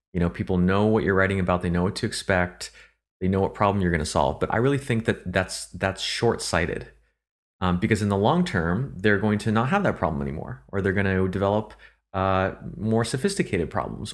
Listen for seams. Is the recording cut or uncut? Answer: uncut